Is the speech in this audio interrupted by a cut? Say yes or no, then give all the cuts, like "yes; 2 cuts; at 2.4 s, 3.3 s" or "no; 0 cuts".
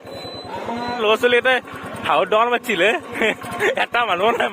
yes; 1 cut; at 0.9 s